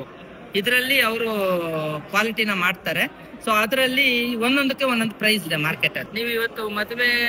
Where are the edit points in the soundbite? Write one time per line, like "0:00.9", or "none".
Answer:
0:06.0